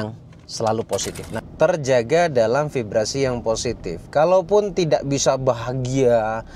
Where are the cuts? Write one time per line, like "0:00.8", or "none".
0:01.5